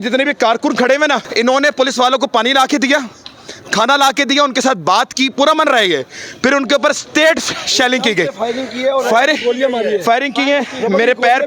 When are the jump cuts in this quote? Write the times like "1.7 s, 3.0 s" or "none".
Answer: 1.3 s